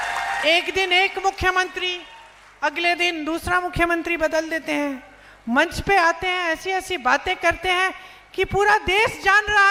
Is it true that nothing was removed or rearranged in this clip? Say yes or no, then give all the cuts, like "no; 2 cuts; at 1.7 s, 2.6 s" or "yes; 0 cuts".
yes; 0 cuts